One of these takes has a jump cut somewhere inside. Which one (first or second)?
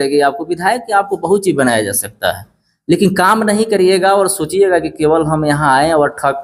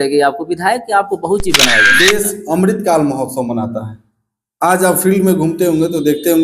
second